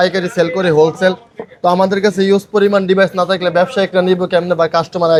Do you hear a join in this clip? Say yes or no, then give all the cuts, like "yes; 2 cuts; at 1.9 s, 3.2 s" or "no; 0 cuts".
no; 0 cuts